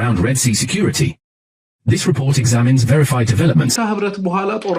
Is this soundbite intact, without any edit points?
no; 1 cut; at 3.8 s

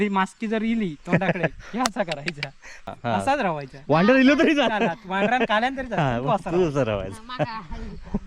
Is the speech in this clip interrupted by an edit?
yes; 1 cut; at 3.0 s

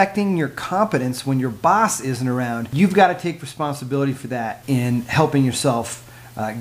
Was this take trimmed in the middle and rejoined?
yes; 2 cuts; at 2.6 s, 4.6 s

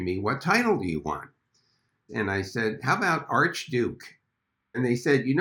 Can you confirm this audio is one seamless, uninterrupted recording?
no; 1 cut; at 4.3 s

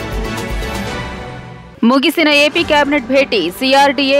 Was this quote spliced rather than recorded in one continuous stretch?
no; 0 cuts

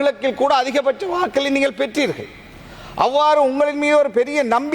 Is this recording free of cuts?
yes; 0 cuts

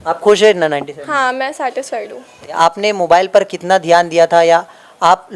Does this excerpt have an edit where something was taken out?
yes; 1 cut; at 2.4 s

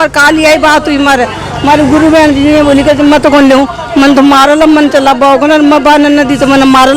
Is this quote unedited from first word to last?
yes; 0 cuts

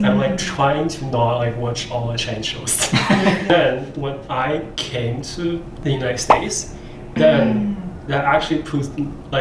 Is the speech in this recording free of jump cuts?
yes; 0 cuts

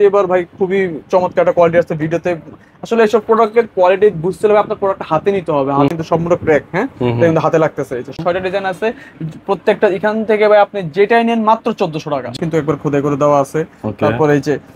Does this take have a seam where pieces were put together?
yes; 3 cuts; at 5.9 s, 8.2 s, 12.3 s

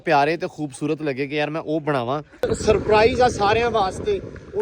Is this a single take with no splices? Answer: no; 1 cut; at 2.5 s

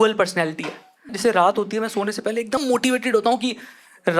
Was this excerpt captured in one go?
no; 2 cuts; at 1.1 s, 2.6 s

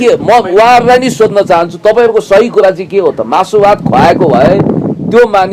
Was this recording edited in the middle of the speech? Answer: no; 0 cuts

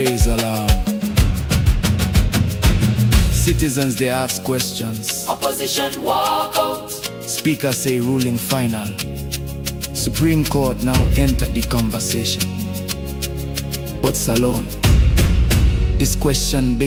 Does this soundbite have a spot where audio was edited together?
no; 0 cuts

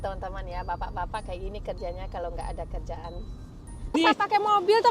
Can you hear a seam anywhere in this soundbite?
yes; 1 cut; at 3.9 s

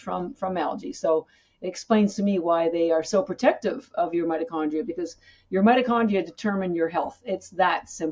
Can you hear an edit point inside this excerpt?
no; 0 cuts

